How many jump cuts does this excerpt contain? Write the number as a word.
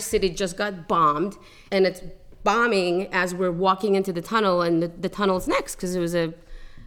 one